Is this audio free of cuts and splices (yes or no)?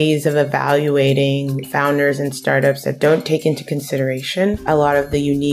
no